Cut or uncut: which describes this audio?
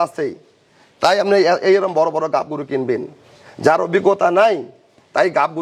uncut